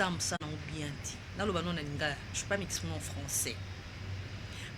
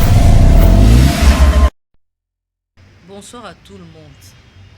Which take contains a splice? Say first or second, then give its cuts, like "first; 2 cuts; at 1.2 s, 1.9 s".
second; 1 cut; at 1.7 s